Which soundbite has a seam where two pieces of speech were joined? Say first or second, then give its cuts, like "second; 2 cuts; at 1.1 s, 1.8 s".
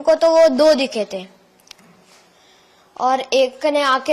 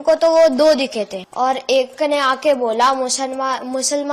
second; 1 cut; at 1.2 s